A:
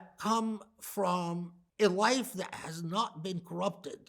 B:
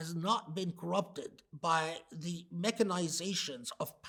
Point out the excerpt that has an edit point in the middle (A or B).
A